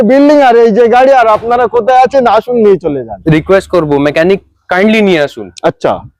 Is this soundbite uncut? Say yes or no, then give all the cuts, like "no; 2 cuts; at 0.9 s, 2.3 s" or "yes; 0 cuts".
no; 1 cut; at 3.1 s